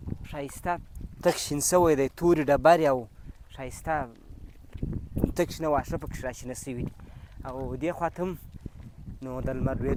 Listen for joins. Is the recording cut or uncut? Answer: uncut